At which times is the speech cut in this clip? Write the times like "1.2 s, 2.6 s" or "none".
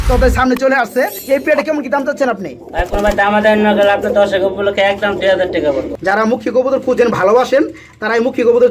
1.1 s, 5.9 s